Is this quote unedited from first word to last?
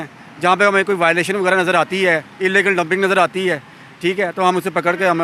yes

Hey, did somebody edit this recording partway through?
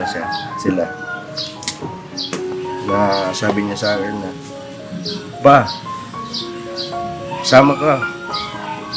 no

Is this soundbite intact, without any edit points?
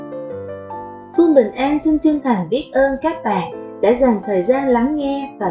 no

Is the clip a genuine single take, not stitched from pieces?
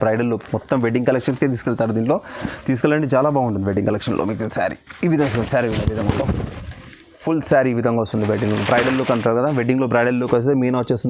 yes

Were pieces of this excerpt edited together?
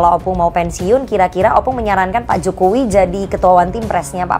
no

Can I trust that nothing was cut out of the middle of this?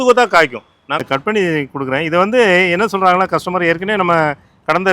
no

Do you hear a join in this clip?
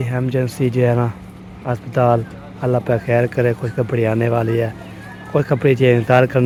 no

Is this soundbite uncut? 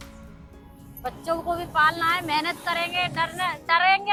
yes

